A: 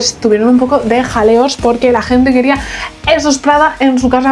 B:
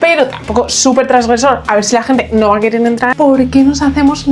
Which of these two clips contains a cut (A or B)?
B